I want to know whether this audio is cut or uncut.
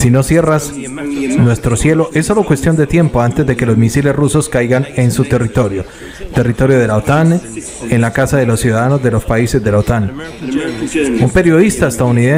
cut